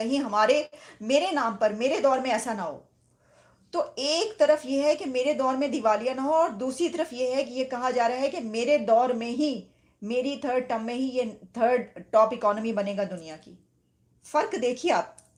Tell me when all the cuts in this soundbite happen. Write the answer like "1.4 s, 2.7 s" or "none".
none